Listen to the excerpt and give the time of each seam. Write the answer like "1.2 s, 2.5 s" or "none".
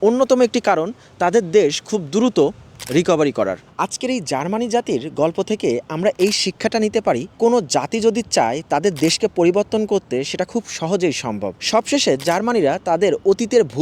3.7 s, 11.5 s